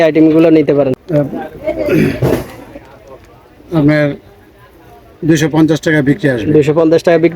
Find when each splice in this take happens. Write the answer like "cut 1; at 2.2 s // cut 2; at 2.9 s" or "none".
cut 1; at 0.9 s